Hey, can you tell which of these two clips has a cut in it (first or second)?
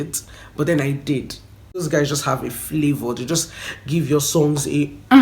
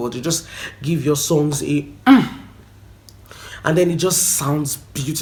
first